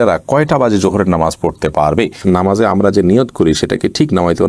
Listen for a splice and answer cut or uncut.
cut